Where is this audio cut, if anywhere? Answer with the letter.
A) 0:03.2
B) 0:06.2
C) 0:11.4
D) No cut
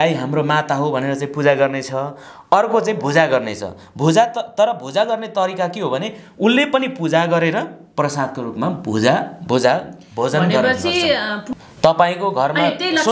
C